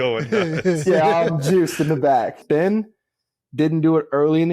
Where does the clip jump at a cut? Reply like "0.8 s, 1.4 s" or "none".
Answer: 2.4 s